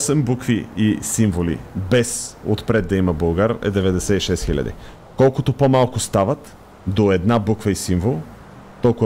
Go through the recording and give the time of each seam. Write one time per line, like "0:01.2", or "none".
none